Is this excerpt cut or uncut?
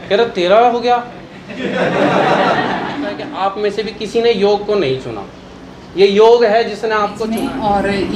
cut